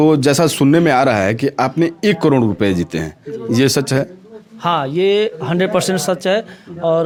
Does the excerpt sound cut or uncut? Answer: uncut